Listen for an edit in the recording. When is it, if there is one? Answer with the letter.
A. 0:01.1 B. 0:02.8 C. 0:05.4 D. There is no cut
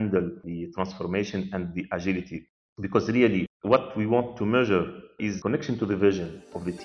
C